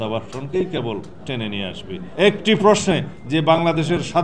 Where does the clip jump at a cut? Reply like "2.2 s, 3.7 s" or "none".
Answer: 2.0 s